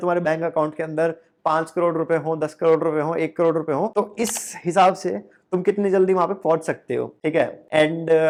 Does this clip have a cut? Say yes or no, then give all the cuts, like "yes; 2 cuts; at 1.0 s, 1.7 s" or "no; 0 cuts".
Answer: no; 0 cuts